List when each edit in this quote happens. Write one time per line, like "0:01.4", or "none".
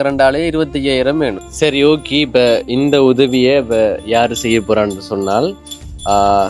0:01.4